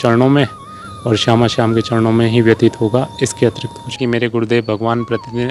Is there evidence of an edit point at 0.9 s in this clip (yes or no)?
no